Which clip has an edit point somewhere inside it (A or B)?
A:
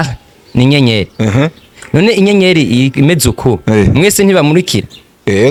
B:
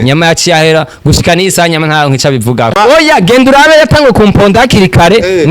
B